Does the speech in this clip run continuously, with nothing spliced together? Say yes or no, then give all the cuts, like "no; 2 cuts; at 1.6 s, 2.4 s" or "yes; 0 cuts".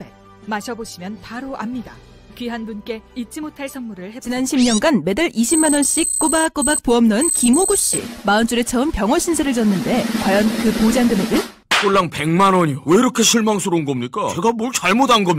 no; 1 cut; at 4.2 s